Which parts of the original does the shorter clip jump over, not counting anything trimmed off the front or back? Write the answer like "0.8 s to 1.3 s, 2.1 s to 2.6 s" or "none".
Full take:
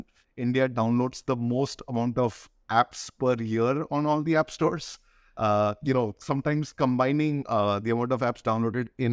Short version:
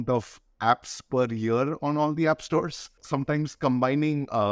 5.1 s to 6.2 s